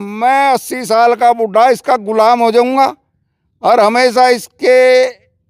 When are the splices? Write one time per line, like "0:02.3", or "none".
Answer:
none